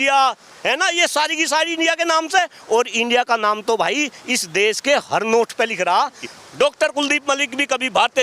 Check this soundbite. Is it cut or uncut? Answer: cut